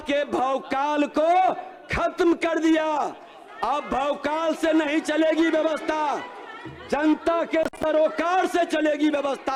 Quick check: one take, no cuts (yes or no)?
yes